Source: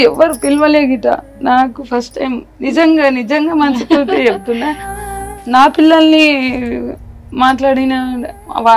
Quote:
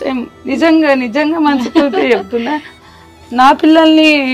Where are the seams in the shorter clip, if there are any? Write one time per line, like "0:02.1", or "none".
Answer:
none